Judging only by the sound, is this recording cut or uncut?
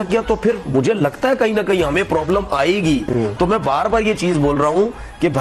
uncut